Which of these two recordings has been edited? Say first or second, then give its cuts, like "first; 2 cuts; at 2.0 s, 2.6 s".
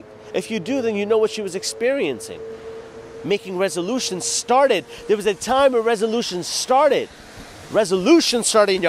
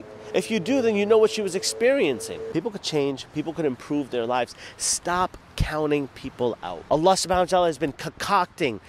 second; 2 cuts; at 2.3 s, 6.7 s